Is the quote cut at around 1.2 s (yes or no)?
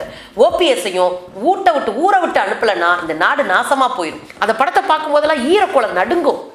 no